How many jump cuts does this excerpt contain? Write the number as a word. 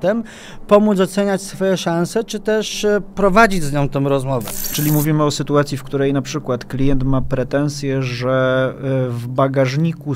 one